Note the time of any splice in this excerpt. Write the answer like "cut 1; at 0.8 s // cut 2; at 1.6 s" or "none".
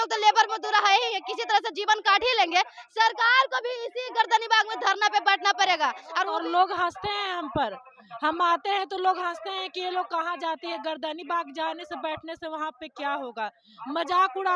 cut 1; at 6.1 s